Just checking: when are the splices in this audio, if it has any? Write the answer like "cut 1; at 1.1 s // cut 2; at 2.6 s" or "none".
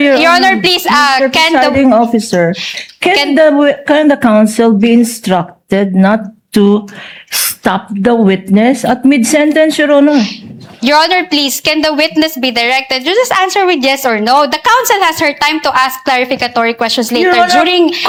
none